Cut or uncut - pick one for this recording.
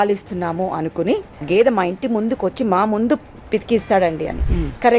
cut